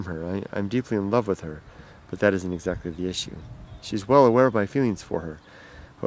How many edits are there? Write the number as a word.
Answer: one